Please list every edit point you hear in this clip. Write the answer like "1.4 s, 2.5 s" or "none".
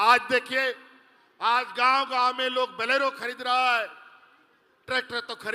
none